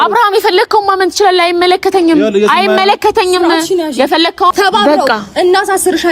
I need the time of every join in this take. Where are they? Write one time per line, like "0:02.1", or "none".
0:04.5